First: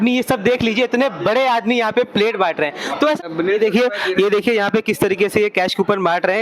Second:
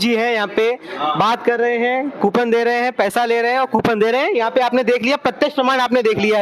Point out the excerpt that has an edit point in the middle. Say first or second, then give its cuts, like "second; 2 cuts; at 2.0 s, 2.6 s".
first; 1 cut; at 3.2 s